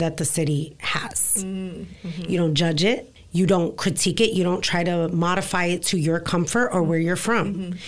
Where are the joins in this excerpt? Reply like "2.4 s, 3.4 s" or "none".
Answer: 3.2 s